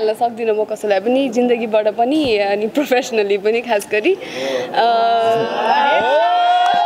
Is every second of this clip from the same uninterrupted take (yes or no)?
yes